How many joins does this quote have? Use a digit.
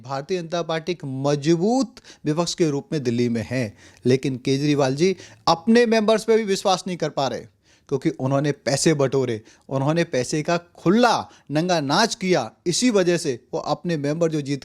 0